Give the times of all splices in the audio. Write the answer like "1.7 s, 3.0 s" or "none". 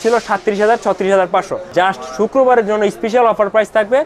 1.6 s